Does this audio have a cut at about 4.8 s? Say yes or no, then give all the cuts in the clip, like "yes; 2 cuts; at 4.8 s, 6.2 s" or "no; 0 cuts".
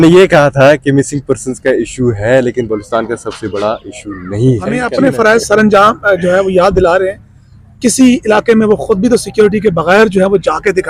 yes; 1 cut; at 4.8 s